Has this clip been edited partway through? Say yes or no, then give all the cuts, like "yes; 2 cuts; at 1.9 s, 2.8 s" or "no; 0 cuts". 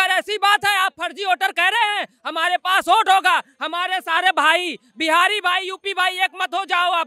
no; 0 cuts